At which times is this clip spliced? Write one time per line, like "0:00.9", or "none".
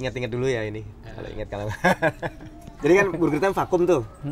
0:02.7